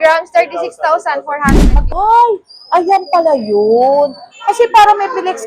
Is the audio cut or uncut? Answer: cut